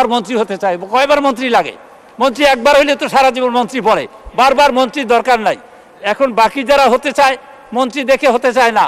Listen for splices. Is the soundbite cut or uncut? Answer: uncut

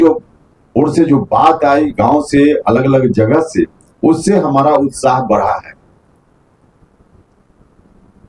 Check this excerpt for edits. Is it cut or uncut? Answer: uncut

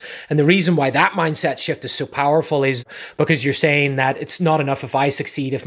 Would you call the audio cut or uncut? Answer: cut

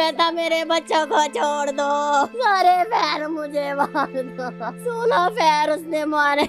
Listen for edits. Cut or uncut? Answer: cut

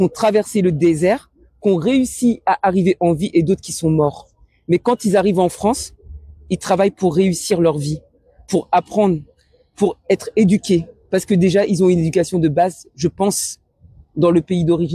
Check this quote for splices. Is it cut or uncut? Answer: uncut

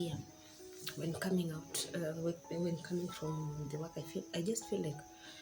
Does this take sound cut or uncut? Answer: uncut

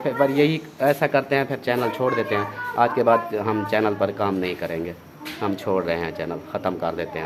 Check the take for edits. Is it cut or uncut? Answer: uncut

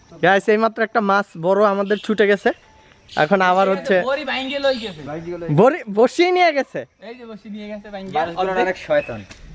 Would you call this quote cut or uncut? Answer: uncut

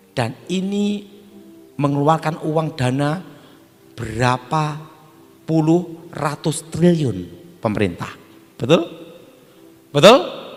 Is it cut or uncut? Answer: uncut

